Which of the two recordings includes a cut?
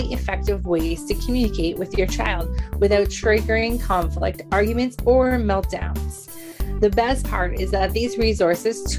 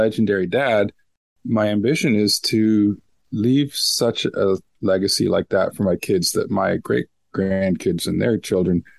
second; 1 cut; at 1.3 s

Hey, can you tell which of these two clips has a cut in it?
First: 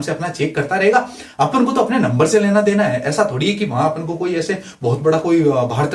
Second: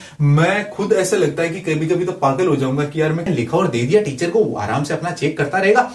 second; 1 cut; at 3.3 s

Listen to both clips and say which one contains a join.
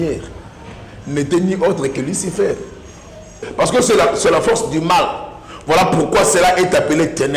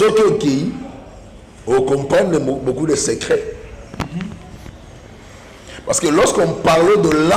first; 1 cut; at 3.5 s

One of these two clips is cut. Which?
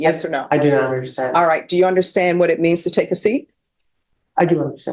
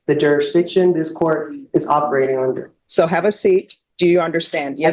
second; 2 cuts; at 2.7 s, 3.8 s

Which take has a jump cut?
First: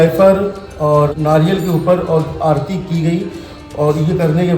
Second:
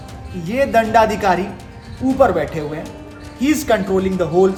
first; 1 cut; at 1.1 s

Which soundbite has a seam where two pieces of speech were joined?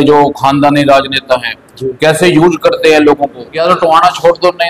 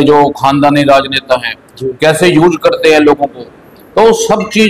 first; 1 cut; at 3.5 s

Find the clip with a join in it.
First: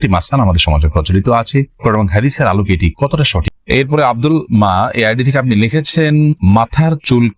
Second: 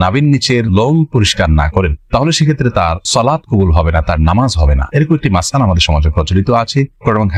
first; 1 cut; at 3.5 s

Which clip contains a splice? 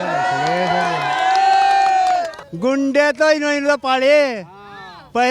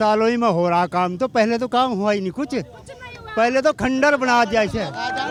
first; 1 cut; at 2.4 s

